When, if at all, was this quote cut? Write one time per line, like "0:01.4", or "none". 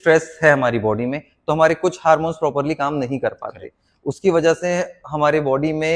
none